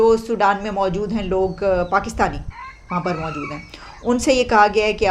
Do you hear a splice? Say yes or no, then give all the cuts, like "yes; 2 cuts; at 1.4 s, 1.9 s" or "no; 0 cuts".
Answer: no; 0 cuts